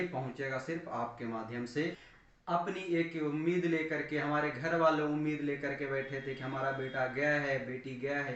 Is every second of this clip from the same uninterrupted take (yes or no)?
no